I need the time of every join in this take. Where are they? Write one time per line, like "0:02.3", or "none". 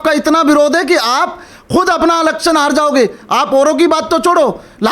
none